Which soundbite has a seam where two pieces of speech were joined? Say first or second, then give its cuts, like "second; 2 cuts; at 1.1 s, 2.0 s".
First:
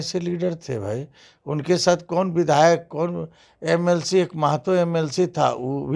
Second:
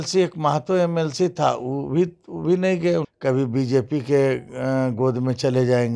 second; 1 cut; at 3.1 s